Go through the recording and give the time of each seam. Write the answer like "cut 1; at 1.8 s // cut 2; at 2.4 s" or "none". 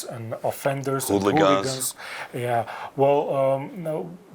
none